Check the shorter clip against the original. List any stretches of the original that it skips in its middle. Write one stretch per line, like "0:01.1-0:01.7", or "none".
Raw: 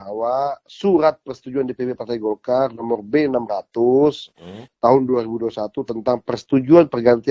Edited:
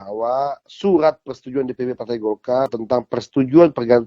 0:02.8-0:05.9